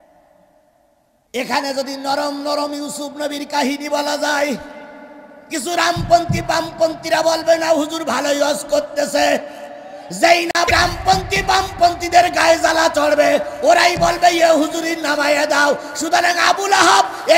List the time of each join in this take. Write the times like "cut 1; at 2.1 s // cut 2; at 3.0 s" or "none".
cut 1; at 1.1 s // cut 2; at 10.7 s